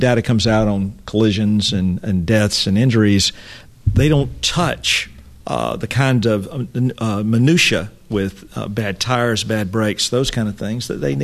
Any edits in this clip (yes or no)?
no